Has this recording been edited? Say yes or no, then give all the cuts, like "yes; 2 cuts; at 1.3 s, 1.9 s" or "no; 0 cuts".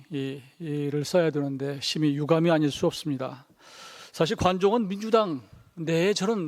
no; 0 cuts